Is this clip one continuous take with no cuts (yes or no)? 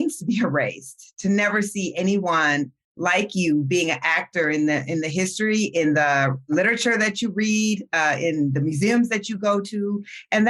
no